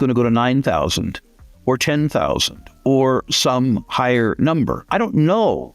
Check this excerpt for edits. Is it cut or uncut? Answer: cut